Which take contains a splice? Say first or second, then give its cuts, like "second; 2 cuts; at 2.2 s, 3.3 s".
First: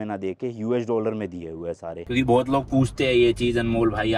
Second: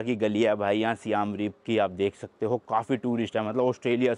first; 1 cut; at 1.9 s